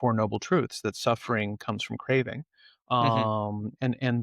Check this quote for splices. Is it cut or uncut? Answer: uncut